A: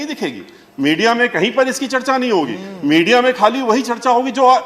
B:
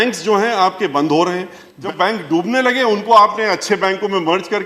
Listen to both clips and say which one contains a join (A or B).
B